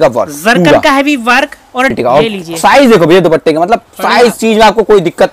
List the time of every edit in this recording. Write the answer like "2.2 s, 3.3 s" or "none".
1.9 s